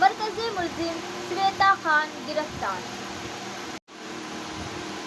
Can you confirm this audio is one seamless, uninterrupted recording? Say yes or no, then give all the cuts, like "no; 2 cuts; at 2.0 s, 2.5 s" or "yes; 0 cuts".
no; 1 cut; at 3.8 s